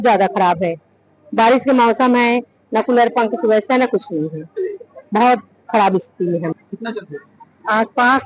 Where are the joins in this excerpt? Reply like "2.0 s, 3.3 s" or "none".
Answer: 6.5 s